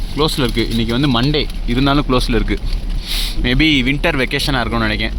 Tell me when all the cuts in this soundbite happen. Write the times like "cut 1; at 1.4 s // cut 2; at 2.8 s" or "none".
none